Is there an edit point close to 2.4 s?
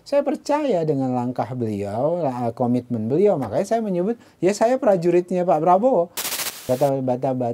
no; 1 cut; at 6.2 s

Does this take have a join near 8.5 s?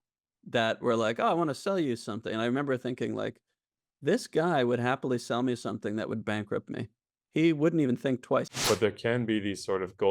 yes; 1 cut; at 8.5 s

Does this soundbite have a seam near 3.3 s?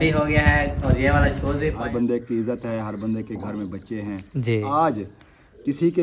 no; 2 cuts; at 1.8 s, 4.6 s

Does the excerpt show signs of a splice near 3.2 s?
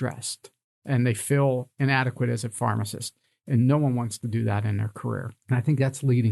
no; 1 cut; at 5.4 s

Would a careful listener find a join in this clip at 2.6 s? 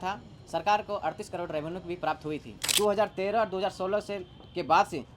yes; 1 cut; at 2.6 s

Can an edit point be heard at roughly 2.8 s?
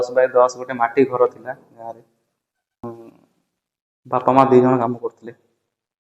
yes; 1 cut; at 2.8 s

